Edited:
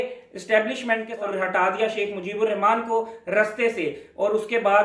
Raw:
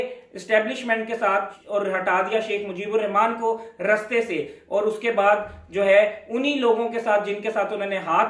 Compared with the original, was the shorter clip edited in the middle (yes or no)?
yes